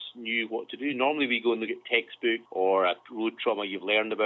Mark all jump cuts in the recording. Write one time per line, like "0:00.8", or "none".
0:02.5